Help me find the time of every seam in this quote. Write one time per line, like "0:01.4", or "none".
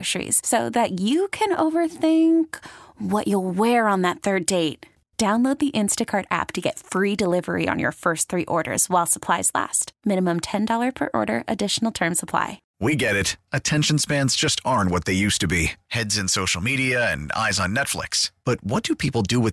0:12.6